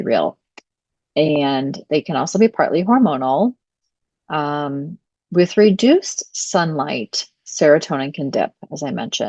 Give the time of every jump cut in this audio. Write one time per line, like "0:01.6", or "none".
none